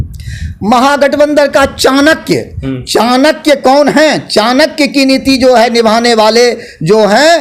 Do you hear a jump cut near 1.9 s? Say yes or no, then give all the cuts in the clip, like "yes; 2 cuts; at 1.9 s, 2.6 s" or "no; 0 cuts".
no; 0 cuts